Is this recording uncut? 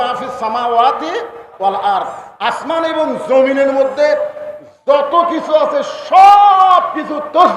yes; 0 cuts

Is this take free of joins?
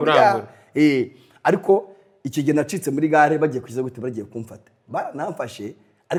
yes; 0 cuts

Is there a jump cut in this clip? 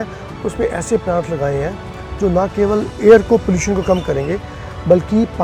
no; 0 cuts

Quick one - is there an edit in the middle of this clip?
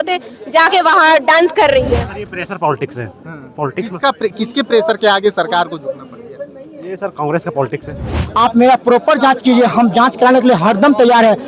yes; 2 cuts; at 2.1 s, 8.3 s

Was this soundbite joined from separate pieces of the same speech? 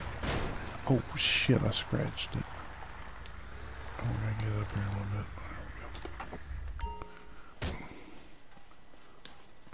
no; 0 cuts

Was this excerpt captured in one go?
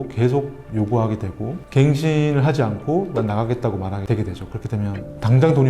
yes; 0 cuts

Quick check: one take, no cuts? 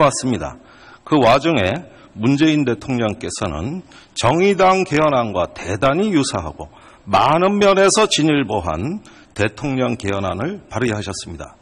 yes; 0 cuts

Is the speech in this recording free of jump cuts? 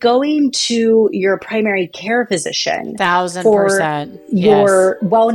yes; 0 cuts

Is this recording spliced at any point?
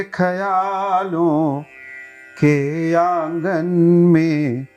no; 0 cuts

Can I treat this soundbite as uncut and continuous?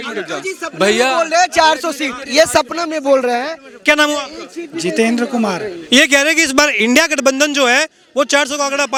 yes; 0 cuts

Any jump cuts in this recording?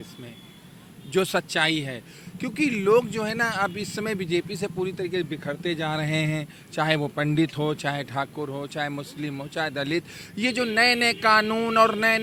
no; 0 cuts

